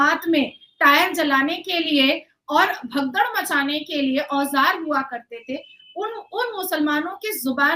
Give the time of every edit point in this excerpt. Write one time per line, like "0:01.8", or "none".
none